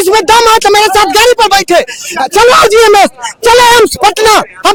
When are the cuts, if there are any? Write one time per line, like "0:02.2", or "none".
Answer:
none

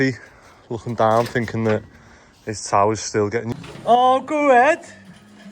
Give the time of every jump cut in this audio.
0:03.5

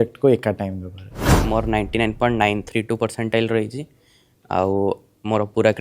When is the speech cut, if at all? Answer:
0:01.3

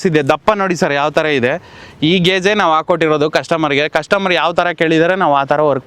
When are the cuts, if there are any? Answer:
none

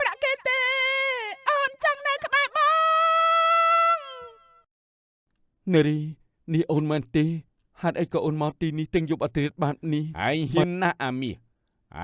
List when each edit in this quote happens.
0:10.1

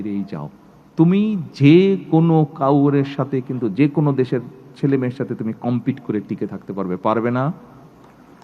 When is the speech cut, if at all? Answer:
none

